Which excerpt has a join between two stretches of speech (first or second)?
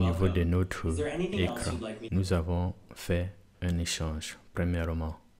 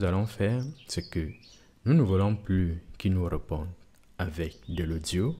first